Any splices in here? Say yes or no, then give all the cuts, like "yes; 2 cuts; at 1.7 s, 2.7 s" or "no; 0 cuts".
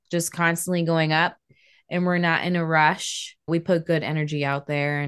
no; 0 cuts